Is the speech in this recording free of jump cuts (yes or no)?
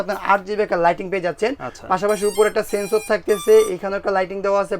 yes